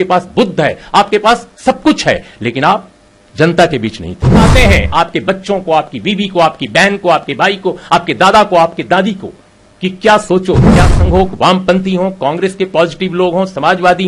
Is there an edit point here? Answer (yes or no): yes